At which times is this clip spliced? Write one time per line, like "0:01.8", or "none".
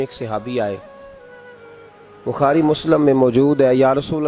none